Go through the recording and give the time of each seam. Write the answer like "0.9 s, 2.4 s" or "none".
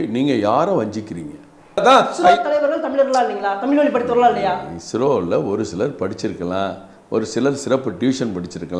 1.8 s